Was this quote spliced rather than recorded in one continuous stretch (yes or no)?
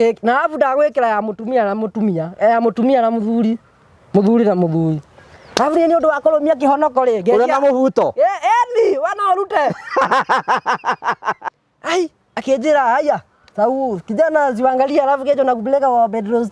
yes